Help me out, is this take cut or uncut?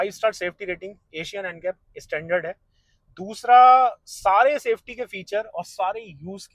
uncut